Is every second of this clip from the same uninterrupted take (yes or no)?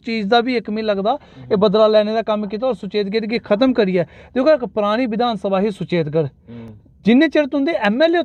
yes